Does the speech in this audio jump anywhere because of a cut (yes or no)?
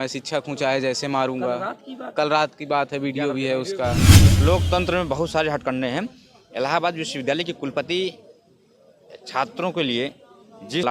yes